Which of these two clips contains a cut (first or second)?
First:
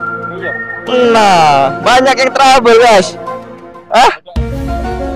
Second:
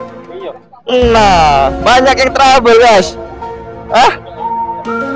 second